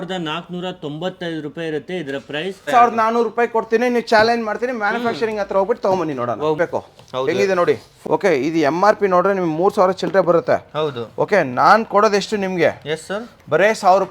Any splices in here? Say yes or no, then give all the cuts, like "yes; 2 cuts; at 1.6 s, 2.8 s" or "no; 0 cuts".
yes; 3 cuts; at 2.7 s, 6.6 s, 7.9 s